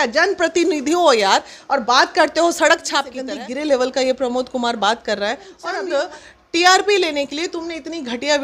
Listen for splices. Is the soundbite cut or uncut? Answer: cut